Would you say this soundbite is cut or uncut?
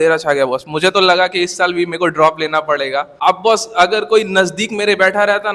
cut